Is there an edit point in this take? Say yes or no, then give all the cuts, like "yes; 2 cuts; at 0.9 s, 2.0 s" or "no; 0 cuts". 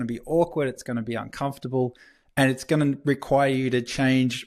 no; 0 cuts